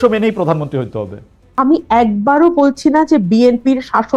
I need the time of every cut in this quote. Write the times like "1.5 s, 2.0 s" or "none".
1.4 s